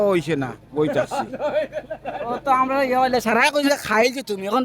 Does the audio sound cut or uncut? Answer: uncut